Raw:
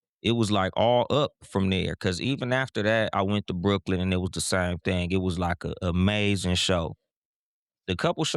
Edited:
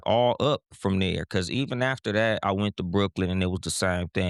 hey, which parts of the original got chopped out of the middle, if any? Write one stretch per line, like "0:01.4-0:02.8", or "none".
none